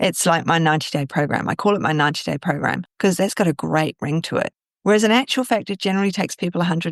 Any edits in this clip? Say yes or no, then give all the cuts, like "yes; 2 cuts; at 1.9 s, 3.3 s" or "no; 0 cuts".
yes; 1 cut; at 2.9 s